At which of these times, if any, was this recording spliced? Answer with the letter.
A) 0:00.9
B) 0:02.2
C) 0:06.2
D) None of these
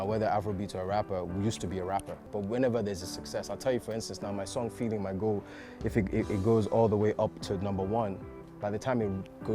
B